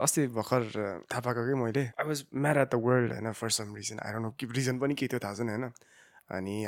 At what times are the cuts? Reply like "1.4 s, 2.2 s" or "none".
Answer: 1.0 s, 1.9 s